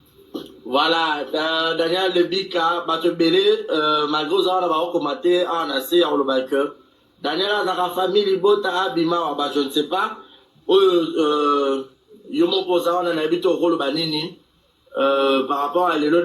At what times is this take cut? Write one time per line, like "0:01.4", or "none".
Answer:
0:02.6
0:11.5